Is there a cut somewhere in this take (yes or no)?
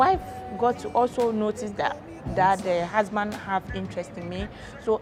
no